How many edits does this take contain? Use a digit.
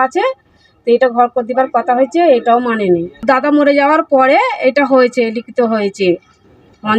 0